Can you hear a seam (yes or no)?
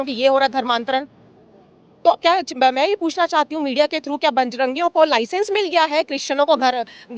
no